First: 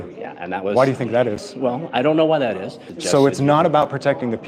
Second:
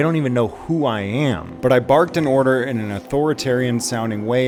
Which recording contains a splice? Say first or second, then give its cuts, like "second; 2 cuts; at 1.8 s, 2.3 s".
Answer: first; 1 cut; at 2.9 s